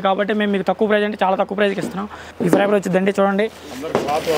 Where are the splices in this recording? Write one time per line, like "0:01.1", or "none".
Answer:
0:02.3